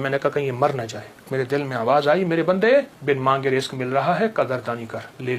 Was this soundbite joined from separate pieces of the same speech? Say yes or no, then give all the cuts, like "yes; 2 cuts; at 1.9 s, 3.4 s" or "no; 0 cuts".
yes; 2 cuts; at 1.3 s, 2.9 s